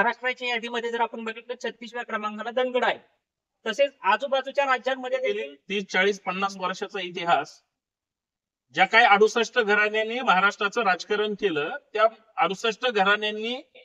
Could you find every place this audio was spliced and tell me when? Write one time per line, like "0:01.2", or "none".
0:05.5